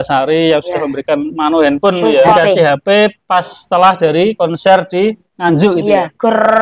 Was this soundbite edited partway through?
yes; 1 cut; at 2.3 s

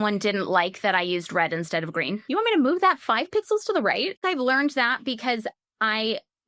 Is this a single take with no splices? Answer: no; 2 cuts; at 2.2 s, 4.2 s

